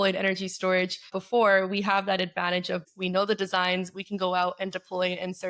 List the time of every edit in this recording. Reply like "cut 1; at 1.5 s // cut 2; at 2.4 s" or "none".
cut 1; at 1.2 s // cut 2; at 2.9 s